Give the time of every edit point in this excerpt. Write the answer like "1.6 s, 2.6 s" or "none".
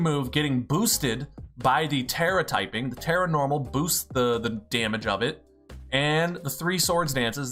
none